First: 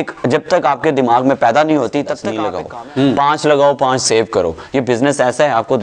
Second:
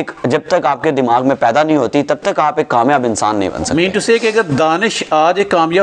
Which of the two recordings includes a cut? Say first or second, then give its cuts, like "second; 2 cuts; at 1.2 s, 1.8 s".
first; 1 cut; at 2.4 s